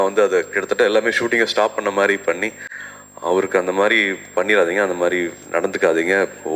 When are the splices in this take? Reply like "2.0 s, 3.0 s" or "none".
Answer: none